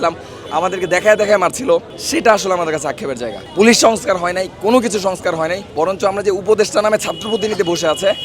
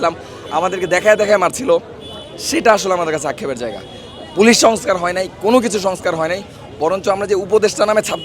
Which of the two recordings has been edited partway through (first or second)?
first